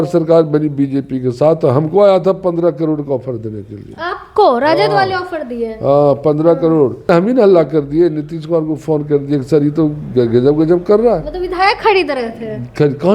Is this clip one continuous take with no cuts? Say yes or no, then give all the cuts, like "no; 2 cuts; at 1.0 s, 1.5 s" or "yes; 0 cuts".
no; 1 cut; at 7.1 s